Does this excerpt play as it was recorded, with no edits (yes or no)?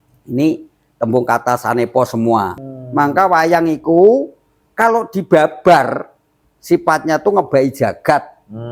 no